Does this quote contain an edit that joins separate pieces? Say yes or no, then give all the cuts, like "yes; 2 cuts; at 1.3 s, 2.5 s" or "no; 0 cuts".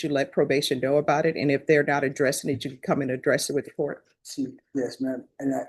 no; 0 cuts